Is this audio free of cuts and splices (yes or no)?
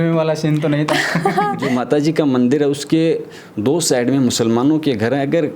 no